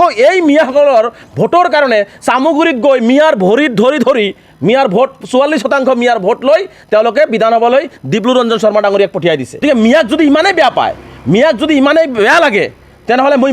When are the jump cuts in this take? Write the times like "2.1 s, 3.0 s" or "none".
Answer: 9.6 s